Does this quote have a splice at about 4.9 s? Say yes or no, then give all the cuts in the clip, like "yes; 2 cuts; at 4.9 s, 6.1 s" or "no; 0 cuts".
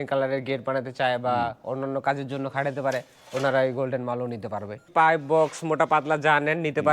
yes; 1 cut; at 4.9 s